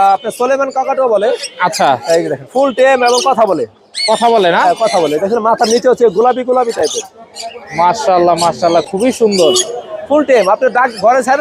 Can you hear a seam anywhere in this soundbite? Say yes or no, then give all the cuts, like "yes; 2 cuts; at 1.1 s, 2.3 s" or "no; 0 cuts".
no; 0 cuts